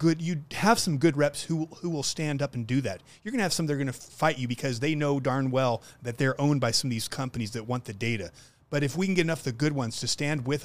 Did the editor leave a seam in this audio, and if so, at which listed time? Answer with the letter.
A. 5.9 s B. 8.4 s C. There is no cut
C